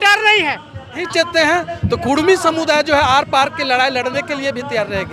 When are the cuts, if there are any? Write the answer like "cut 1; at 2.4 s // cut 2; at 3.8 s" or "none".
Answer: cut 1; at 1.0 s

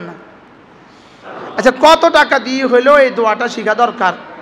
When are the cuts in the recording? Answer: cut 1; at 1.3 s

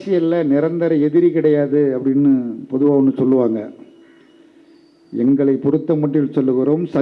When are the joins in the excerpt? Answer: none

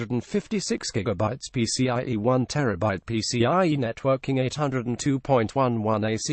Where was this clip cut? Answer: none

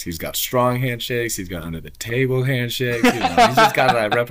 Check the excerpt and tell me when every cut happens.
none

